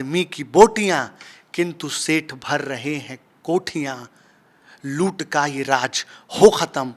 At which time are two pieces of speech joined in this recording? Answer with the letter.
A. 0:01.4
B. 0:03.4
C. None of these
C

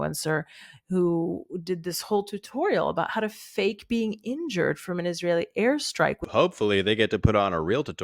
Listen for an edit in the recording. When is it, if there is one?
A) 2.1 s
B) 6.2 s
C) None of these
B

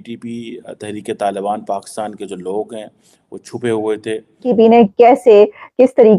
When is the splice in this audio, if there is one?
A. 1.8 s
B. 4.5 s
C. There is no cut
B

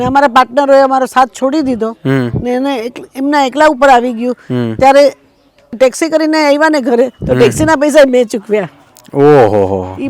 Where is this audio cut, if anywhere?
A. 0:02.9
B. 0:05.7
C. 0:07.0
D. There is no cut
B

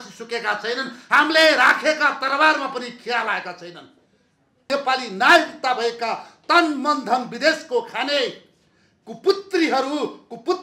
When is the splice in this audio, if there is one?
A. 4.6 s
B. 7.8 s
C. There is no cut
A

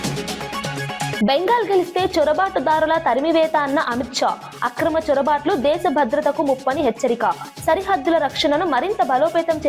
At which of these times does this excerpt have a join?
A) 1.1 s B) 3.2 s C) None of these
A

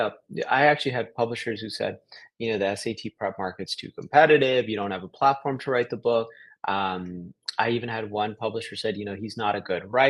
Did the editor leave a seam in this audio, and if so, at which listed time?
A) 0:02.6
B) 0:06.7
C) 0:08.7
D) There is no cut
D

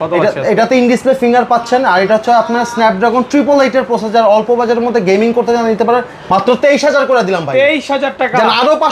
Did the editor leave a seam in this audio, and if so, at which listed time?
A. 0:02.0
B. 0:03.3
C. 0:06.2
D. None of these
C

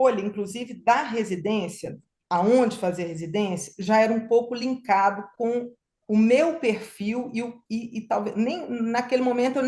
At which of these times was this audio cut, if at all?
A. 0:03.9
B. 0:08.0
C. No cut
C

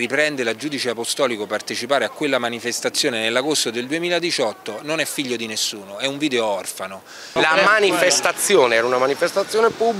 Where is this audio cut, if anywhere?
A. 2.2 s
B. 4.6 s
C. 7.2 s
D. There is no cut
C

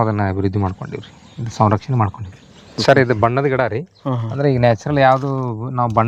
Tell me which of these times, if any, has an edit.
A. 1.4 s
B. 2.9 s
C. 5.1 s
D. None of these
B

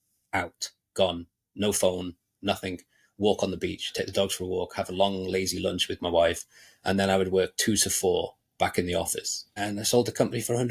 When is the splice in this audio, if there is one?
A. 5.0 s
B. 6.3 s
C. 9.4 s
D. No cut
C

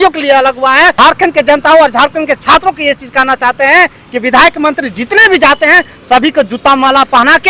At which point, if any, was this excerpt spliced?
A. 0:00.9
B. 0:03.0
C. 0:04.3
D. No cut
A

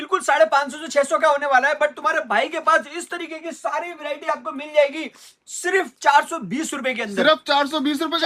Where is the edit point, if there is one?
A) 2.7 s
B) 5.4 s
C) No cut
C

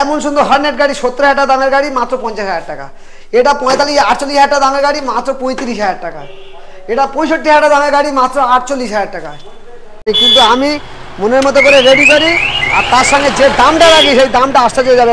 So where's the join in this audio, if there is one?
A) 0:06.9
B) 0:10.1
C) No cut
B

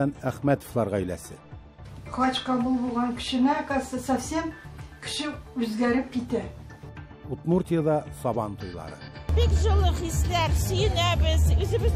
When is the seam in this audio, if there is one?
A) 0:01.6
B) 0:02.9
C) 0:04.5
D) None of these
D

